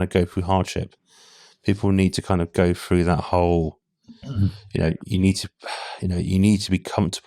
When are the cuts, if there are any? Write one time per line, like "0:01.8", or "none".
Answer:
none